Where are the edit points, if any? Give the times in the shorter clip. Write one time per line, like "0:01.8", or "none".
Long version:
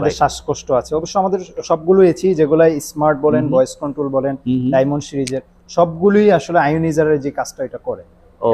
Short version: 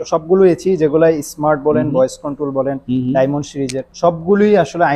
0:03.8